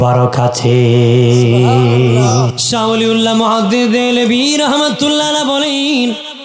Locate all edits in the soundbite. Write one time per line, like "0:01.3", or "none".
0:02.6

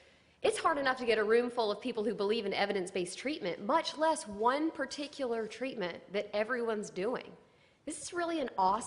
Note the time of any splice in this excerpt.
0:03.2

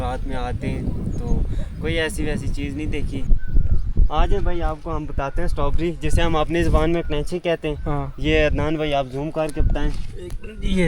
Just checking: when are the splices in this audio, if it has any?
0:03.3

